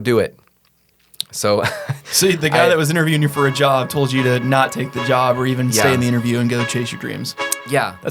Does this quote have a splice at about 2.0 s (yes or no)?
no